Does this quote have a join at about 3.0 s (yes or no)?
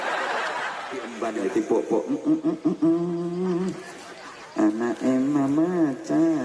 no